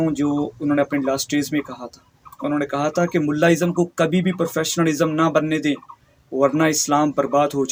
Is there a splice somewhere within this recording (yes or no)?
no